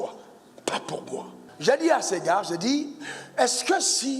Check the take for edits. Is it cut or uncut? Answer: cut